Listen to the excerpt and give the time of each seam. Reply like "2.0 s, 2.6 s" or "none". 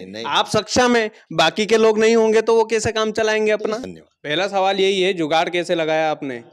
3.9 s